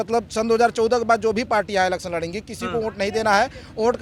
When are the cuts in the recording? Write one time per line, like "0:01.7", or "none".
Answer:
none